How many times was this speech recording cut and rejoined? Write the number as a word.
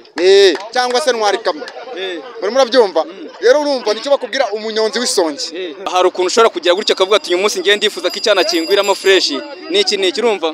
one